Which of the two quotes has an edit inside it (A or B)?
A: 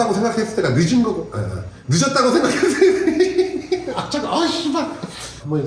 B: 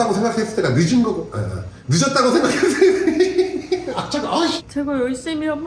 B